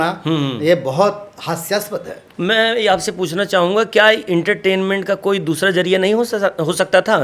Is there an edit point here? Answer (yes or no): yes